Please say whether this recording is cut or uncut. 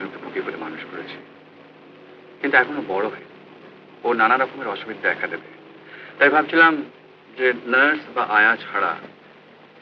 uncut